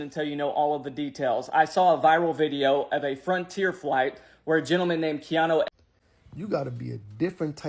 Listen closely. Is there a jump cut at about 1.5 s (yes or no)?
no